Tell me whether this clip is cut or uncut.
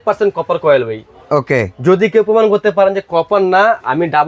uncut